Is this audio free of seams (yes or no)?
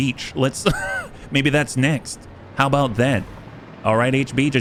yes